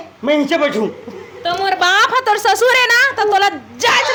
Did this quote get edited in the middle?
no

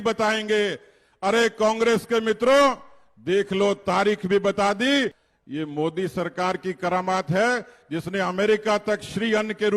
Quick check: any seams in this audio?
yes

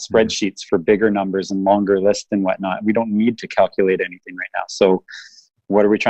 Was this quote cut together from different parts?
no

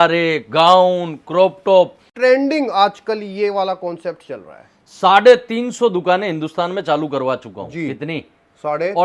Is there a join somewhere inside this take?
yes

